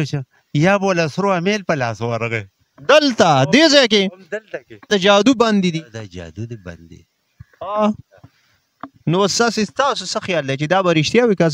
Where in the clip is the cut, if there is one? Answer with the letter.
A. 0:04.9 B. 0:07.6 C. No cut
A